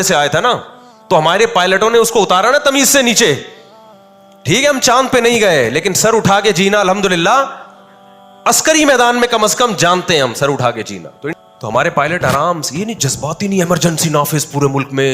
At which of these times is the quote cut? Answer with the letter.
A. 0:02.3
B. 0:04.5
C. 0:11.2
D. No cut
C